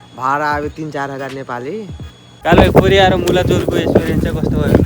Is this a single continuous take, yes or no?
no